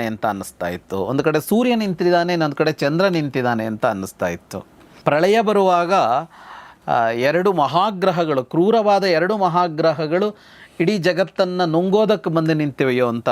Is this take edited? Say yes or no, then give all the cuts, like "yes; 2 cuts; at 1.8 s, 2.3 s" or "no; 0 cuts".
yes; 1 cut; at 4.8 s